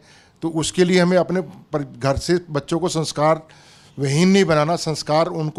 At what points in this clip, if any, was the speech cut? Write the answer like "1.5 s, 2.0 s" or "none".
none